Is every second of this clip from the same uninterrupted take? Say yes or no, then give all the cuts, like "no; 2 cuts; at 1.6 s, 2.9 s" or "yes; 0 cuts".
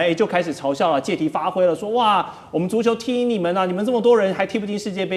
yes; 0 cuts